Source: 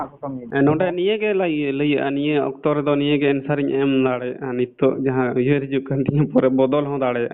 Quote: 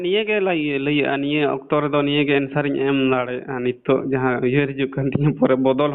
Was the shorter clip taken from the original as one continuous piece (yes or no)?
yes